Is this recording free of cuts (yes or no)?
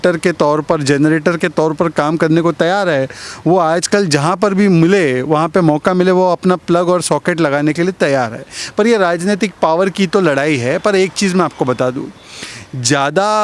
yes